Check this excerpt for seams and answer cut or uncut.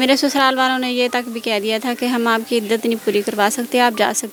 uncut